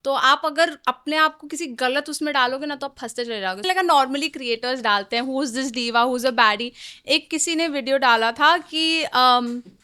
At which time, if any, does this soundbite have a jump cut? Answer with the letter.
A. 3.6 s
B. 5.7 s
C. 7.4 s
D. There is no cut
A